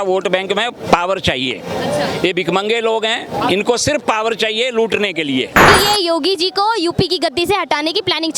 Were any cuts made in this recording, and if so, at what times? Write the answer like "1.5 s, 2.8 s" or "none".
5.7 s